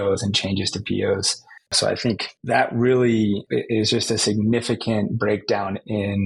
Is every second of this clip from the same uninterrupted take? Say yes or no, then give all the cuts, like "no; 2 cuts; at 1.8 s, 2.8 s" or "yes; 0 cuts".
yes; 0 cuts